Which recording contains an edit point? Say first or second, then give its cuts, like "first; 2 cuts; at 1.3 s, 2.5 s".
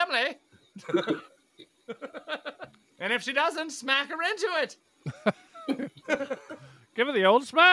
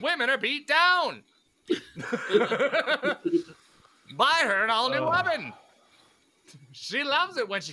first; 1 cut; at 2.8 s